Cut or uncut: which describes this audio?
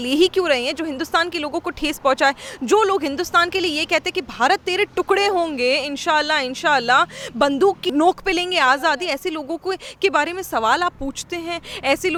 uncut